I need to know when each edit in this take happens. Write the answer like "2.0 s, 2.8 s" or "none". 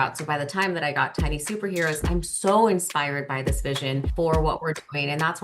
4.1 s